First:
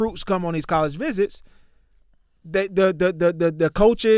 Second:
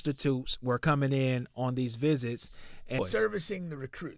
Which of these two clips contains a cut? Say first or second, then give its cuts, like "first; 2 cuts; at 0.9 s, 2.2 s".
second; 1 cut; at 3.0 s